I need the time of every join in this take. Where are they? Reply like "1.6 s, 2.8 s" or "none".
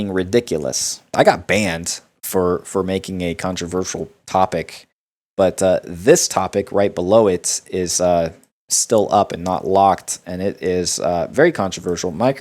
1.1 s